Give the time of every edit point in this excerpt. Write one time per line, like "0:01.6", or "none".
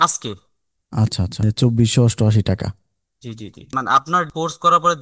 0:01.4
0:03.6